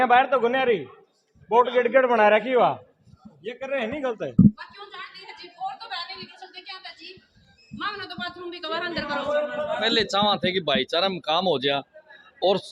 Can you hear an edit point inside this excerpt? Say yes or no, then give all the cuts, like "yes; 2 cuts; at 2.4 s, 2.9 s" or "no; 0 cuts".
no; 0 cuts